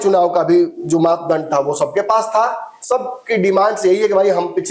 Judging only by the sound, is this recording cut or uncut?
uncut